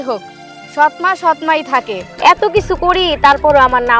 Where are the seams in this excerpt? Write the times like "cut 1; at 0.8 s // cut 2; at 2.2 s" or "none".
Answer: cut 1; at 2.0 s